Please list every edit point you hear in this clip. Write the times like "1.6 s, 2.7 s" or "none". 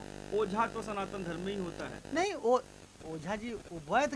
none